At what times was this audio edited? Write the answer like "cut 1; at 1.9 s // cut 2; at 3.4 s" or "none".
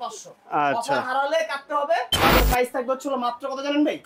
cut 1; at 2.4 s